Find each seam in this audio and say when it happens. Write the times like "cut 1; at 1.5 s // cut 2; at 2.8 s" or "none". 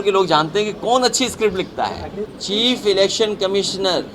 cut 1; at 2.3 s